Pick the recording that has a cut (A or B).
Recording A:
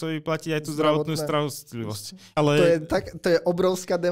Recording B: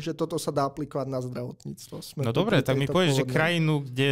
A